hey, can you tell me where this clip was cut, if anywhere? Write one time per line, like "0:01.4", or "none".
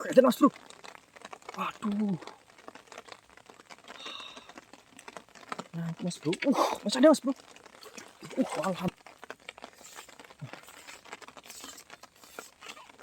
0:08.9